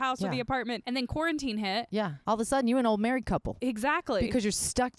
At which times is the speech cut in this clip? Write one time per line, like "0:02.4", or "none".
0:00.8
0:02.2
0:03.5